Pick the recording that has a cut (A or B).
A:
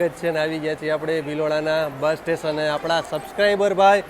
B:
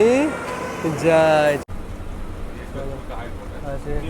B